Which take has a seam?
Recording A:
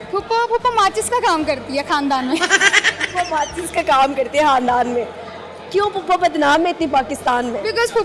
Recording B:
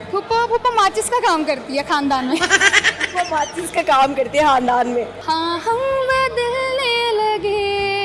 B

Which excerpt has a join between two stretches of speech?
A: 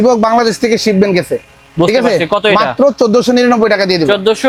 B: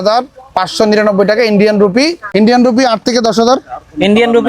B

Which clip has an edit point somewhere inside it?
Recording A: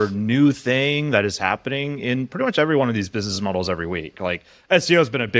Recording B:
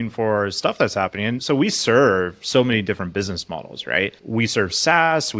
B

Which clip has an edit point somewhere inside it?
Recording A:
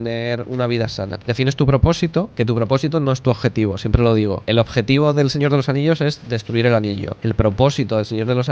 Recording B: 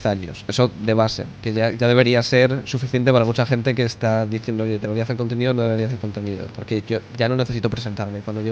A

